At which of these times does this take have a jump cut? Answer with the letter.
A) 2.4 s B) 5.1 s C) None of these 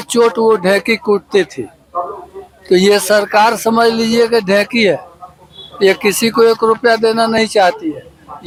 C